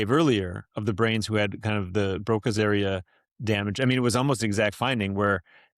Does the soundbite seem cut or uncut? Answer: uncut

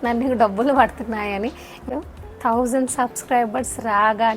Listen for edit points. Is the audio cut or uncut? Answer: cut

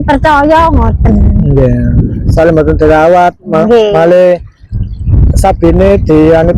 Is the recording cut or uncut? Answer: uncut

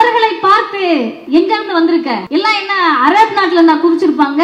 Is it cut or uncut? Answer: cut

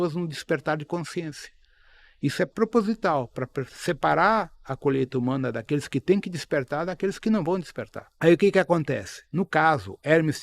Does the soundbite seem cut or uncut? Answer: cut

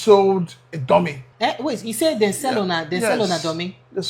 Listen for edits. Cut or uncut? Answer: cut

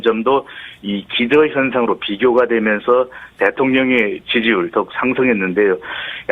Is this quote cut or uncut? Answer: cut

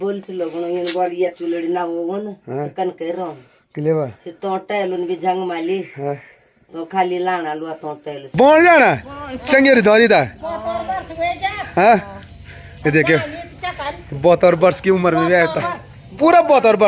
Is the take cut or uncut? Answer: cut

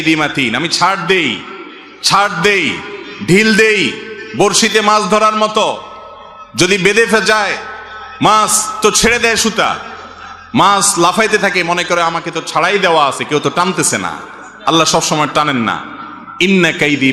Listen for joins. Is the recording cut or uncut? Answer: uncut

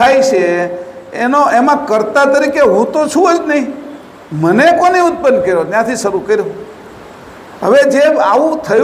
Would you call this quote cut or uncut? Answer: uncut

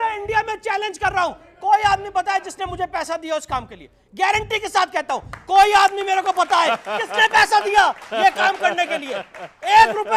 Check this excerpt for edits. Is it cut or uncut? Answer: uncut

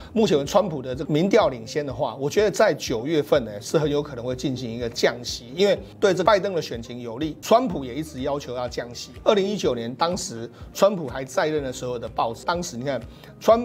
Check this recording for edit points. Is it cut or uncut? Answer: cut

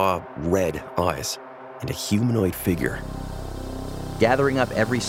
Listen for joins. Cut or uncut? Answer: cut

